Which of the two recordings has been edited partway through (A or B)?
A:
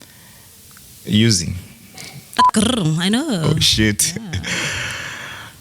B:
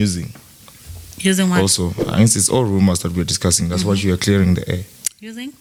A